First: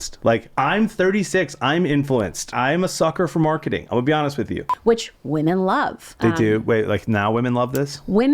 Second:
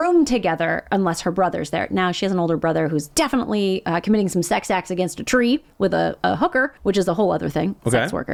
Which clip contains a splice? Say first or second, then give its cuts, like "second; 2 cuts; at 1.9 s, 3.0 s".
first; 3 cuts; at 2.5 s, 4.6 s, 6.1 s